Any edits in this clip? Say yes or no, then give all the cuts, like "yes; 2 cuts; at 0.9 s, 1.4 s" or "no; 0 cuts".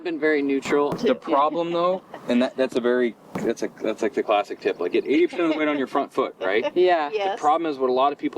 yes; 1 cut; at 0.9 s